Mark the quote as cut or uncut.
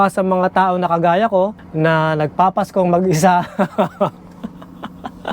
uncut